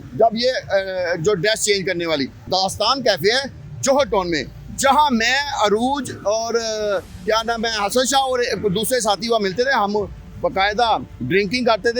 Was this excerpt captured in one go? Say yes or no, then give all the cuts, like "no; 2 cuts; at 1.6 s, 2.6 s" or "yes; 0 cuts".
no; 1 cut; at 2.5 s